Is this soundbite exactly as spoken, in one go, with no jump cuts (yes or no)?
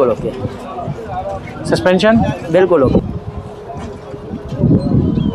no